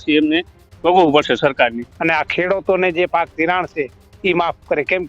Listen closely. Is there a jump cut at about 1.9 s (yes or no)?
yes